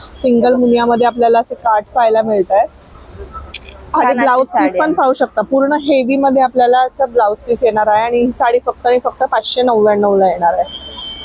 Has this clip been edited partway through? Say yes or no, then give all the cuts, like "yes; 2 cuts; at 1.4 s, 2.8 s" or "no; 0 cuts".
no; 0 cuts